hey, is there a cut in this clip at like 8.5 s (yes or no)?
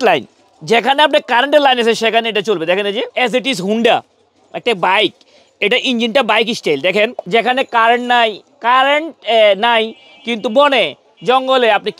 no